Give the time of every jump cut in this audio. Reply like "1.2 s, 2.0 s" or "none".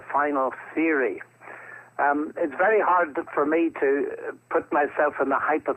2.4 s

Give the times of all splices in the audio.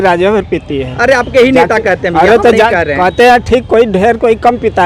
none

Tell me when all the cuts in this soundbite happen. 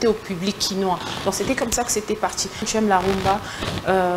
2.7 s

